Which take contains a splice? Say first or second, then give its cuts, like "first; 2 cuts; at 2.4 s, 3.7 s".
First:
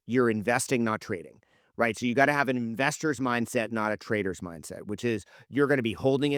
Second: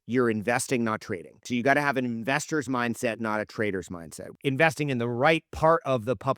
second; 2 cuts; at 1.4 s, 4.2 s